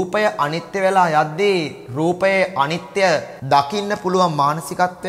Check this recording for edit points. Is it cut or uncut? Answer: cut